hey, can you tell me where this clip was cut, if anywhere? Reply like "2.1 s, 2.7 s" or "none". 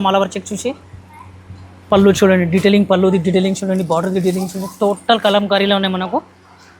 none